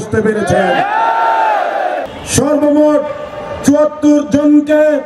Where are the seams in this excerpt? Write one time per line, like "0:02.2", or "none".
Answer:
0:02.2